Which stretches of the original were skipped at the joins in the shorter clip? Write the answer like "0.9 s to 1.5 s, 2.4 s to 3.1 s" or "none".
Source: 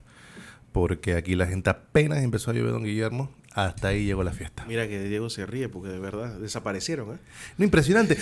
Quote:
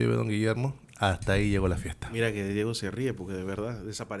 none